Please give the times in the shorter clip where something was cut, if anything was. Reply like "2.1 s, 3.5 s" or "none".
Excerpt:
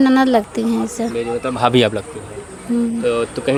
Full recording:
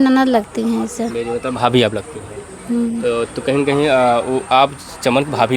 none